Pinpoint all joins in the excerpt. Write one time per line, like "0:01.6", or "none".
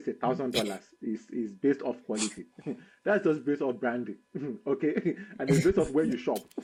none